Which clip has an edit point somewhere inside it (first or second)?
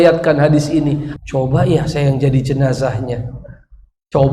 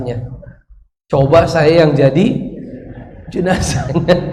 first